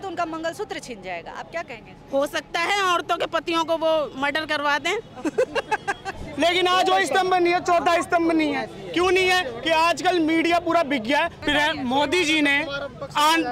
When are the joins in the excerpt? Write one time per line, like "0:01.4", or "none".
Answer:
0:06.2
0:11.4